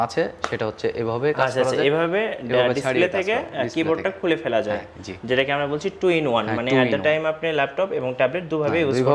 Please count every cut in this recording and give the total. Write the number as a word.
zero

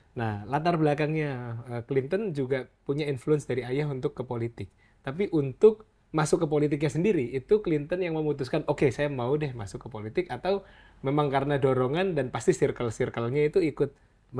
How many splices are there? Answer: zero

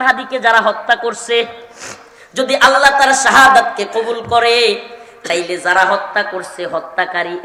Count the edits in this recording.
zero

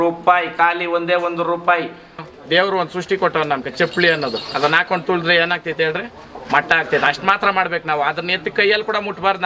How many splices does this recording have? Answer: one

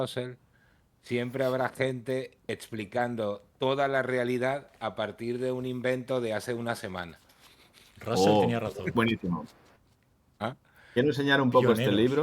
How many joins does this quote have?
one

